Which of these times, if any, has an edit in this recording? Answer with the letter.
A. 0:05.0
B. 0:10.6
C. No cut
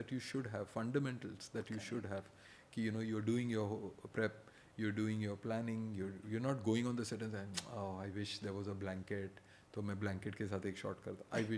C